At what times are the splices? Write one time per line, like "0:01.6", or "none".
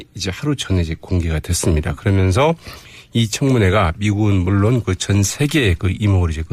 none